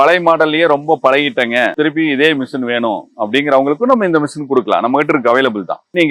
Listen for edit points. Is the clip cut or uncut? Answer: cut